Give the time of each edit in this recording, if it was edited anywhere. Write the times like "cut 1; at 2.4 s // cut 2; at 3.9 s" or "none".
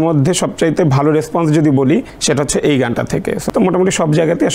cut 1; at 2.1 s // cut 2; at 3.4 s